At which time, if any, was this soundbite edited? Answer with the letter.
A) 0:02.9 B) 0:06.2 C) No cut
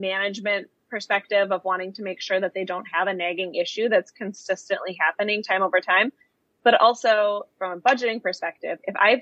C